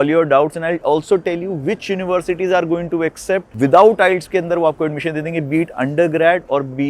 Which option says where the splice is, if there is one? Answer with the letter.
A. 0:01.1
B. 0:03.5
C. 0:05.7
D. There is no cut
B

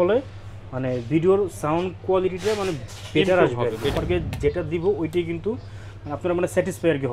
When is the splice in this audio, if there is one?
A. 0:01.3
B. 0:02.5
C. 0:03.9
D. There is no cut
C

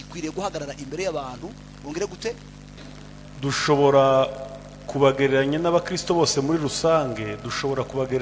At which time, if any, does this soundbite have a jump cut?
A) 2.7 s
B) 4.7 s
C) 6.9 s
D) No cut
A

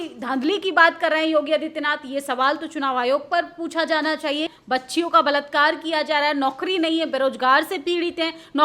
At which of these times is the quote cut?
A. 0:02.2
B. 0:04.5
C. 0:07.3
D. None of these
B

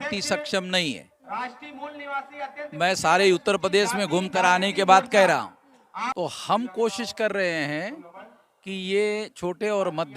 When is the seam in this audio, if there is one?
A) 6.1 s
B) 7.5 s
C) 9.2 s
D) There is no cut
A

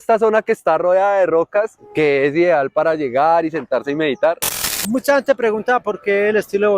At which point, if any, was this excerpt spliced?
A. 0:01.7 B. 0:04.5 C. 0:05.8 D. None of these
B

